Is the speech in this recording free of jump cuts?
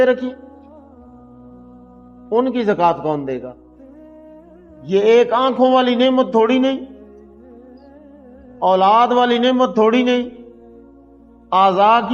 no; 2 cuts; at 7.0 s, 8.6 s

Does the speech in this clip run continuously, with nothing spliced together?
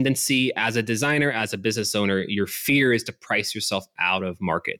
yes; 0 cuts

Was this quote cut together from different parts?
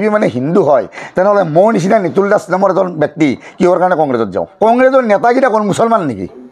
yes; 1 cut; at 4.5 s

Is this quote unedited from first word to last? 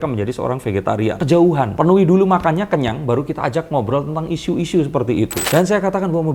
no; 1 cut; at 5.4 s

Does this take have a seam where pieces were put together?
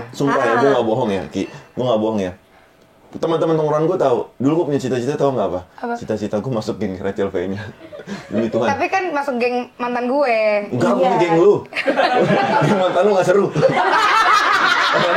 no; 0 cuts

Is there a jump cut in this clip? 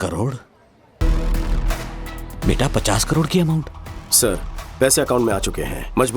yes; 1 cut; at 1.0 s

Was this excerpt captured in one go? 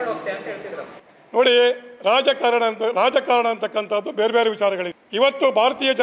yes; 0 cuts

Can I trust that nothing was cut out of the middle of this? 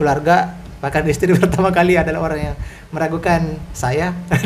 yes; 0 cuts

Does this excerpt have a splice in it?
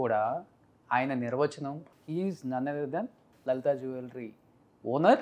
yes; 2 cuts; at 1.8 s, 3.2 s

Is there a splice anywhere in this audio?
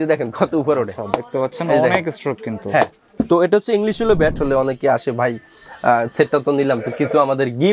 yes; 2 cuts; at 3.2 s, 4.4 s

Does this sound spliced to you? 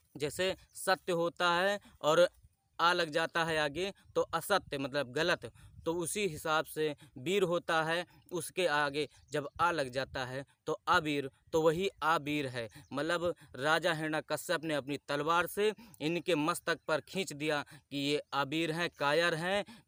no; 0 cuts

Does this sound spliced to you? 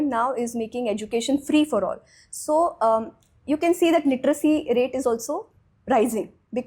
no; 0 cuts

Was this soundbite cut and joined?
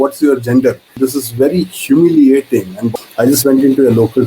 yes; 2 cuts; at 0.9 s, 2.8 s

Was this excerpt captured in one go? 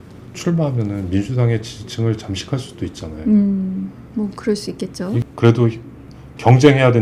no; 1 cut; at 5.2 s

